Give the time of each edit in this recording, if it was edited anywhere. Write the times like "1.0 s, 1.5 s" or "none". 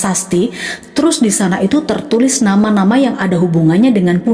none